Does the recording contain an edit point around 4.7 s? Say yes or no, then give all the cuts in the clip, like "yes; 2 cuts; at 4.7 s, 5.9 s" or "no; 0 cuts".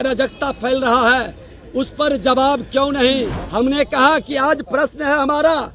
no; 1 cut; at 3.4 s